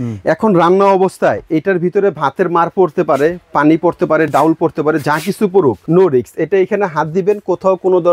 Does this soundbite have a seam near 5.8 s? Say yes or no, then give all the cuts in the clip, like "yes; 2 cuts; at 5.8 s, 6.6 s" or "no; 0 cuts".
yes; 1 cut; at 5.8 s